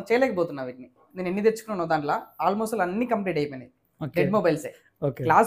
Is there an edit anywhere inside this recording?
yes; 1 cut; at 1.1 s

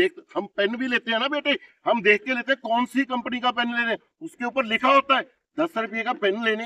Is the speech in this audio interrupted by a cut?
no; 0 cuts

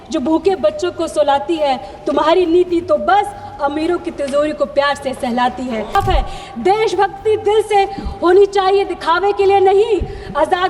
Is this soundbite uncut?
no; 1 cut; at 5.9 s

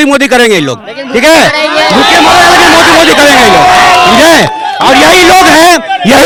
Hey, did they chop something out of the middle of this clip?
no; 0 cuts

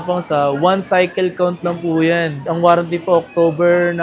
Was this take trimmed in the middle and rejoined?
no; 0 cuts

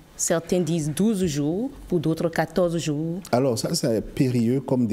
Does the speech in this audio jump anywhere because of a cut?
no; 0 cuts

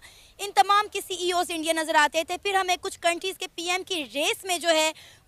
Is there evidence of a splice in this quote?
no; 0 cuts

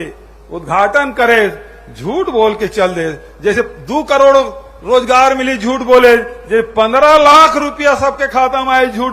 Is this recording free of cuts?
yes; 0 cuts

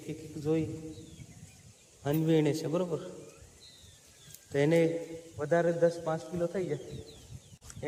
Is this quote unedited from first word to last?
yes; 0 cuts

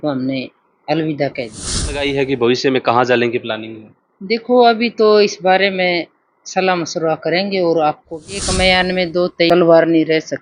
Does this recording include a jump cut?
yes; 3 cuts; at 2.0 s, 8.4 s, 9.5 s

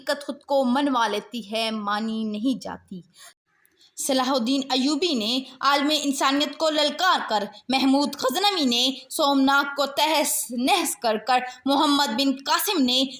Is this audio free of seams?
no; 1 cut; at 3.3 s

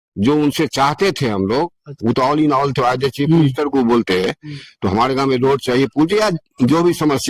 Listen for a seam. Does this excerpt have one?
yes; 1 cut; at 1.9 s

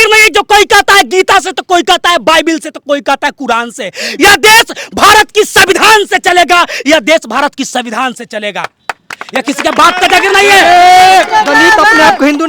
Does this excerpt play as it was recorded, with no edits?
yes; 0 cuts

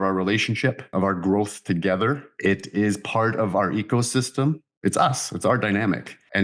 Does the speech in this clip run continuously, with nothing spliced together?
no; 2 cuts; at 0.9 s, 4.7 s

